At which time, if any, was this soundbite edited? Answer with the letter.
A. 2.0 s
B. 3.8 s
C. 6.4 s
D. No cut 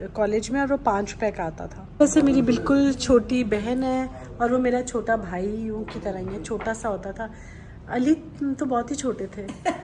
A